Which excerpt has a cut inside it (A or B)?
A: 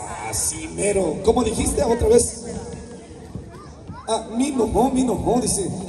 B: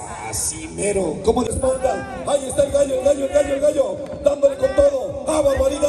B